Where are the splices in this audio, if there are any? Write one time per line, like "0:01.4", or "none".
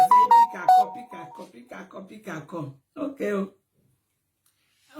0:01.0